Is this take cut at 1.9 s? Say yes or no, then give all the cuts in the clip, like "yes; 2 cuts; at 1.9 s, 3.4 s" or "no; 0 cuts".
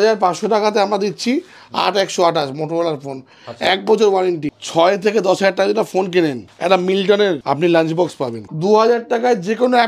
no; 4 cuts; at 4.5 s, 6.5 s, 7.4 s, 8.5 s